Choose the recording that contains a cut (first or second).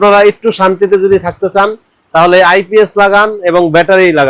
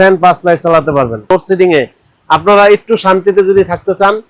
second